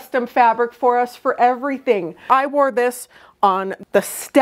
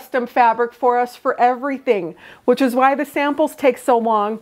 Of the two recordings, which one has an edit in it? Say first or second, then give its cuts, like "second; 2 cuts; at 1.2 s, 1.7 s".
first; 1 cut; at 2.3 s